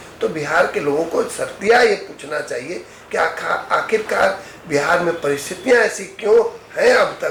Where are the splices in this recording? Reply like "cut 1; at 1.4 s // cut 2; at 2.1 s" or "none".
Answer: none

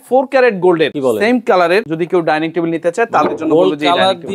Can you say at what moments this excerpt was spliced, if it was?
cut 1; at 0.9 s // cut 2; at 1.9 s

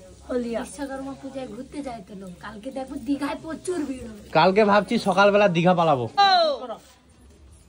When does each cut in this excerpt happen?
cut 1; at 6.1 s

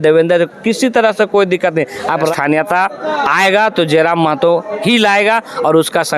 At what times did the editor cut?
cut 1; at 2.3 s

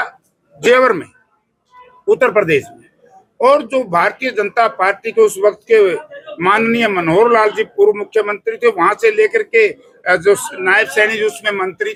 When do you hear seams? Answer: none

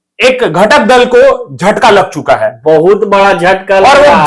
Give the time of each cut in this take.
none

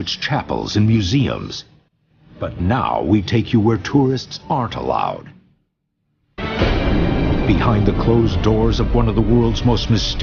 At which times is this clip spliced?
none

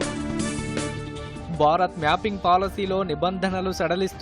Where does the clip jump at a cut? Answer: none

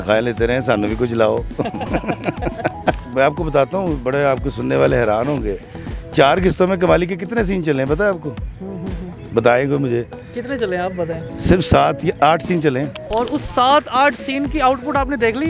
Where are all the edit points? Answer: none

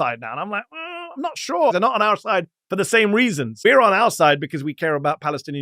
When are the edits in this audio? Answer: cut 1; at 1.7 s // cut 2; at 3.6 s

